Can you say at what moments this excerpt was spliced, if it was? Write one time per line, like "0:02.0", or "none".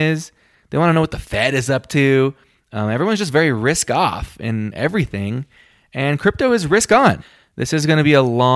0:07.3

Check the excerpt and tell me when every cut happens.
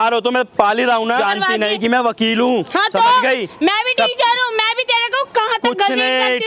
0:01.2

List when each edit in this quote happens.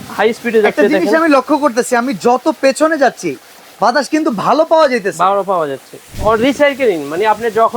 0:06.1

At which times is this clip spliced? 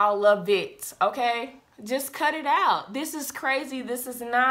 none

